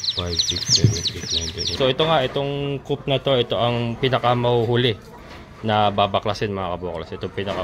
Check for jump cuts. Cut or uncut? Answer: cut